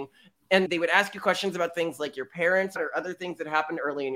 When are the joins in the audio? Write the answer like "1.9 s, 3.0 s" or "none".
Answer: 2.8 s

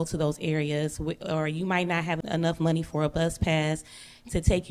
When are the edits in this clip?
2.2 s

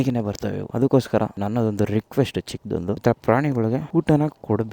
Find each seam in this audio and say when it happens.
none

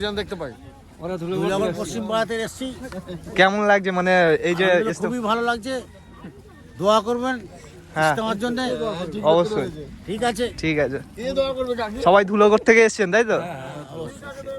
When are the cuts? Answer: none

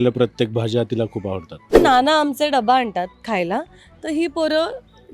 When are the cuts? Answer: 1.7 s

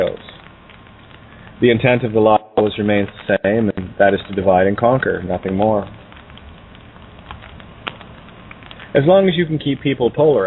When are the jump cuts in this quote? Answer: 3.6 s

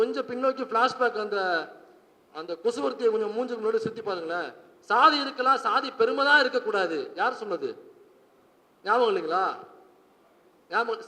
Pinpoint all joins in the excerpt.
none

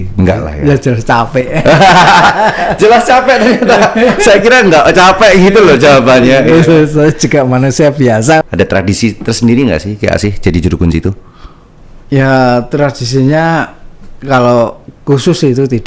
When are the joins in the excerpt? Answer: 8.4 s

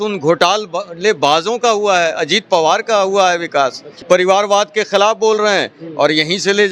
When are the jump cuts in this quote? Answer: 3.9 s

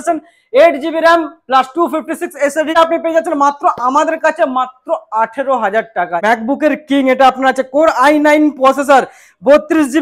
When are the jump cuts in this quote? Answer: 2.7 s, 6.1 s

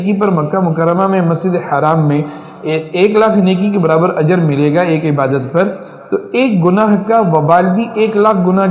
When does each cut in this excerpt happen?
none

